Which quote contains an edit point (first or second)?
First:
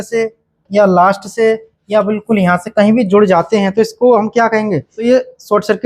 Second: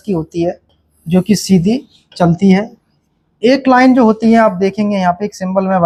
first